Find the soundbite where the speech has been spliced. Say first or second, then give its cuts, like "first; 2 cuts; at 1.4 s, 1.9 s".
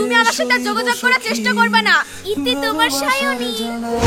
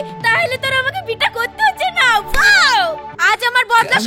second; 1 cut; at 3.1 s